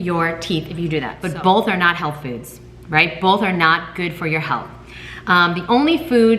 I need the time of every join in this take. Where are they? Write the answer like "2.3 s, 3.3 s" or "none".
1.2 s